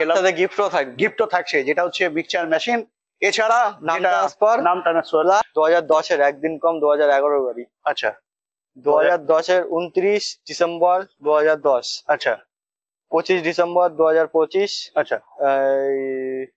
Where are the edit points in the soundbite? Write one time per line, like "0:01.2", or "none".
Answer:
0:05.5